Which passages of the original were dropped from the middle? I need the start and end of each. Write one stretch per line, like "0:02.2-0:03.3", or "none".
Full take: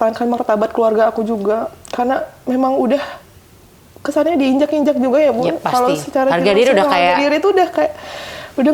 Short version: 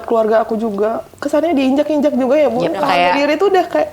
0:01.8-0:03.9
0:05.7-0:06.9